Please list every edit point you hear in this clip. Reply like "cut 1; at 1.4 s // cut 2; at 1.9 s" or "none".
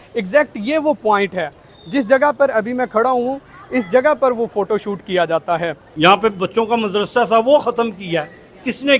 cut 1; at 5.8 s

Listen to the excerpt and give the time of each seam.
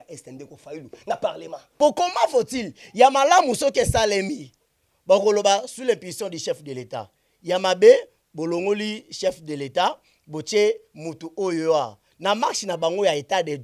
cut 1; at 1.6 s

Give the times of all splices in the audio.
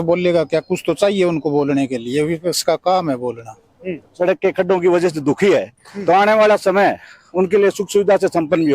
cut 1; at 4.1 s

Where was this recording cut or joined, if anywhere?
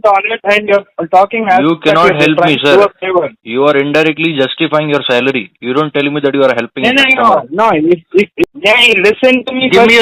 cut 1; at 8.4 s

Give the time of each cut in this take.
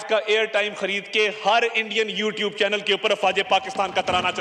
none

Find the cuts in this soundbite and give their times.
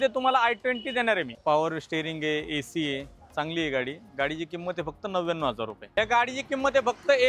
cut 1; at 1.3 s // cut 2; at 5.7 s

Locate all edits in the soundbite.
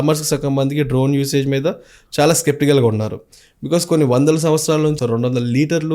cut 1; at 5.0 s

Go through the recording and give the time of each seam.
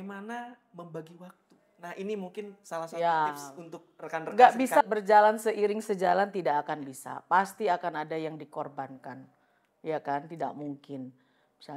none

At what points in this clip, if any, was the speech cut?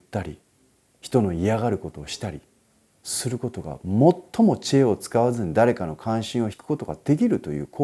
cut 1; at 6.6 s

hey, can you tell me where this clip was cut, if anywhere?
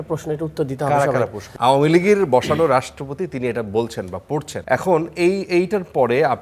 cut 1; at 1.4 s // cut 2; at 4.5 s

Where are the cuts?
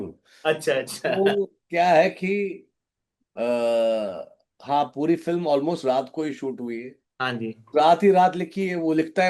none

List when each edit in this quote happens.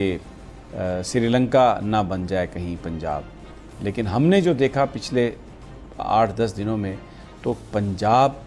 none

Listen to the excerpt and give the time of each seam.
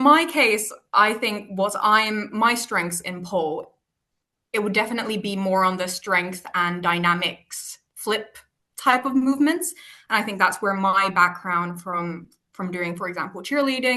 none

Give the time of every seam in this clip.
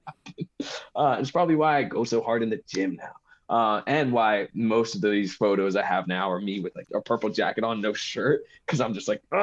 cut 1; at 6.8 s

